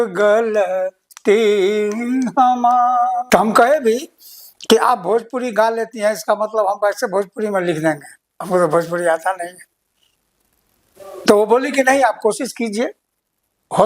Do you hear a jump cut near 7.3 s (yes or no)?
no